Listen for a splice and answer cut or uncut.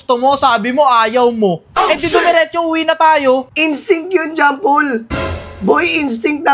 cut